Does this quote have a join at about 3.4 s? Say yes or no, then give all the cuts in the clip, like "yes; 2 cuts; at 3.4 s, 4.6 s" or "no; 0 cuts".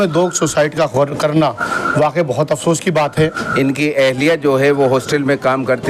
yes; 1 cut; at 3.4 s